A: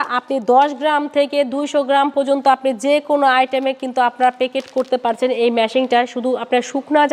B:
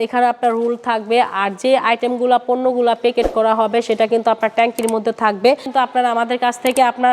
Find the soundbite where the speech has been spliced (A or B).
B